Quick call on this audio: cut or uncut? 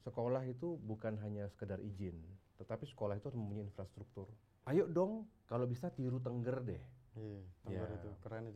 cut